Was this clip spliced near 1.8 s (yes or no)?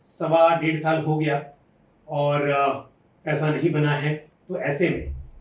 no